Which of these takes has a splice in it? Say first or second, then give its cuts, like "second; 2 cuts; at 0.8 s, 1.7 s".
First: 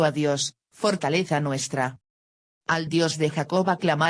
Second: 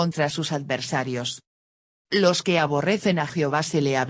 first; 1 cut; at 1.0 s